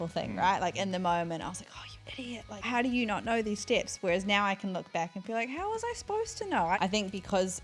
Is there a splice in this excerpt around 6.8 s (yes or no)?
yes